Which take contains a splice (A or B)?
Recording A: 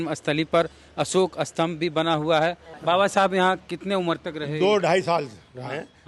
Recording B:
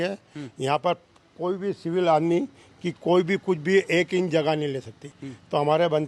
A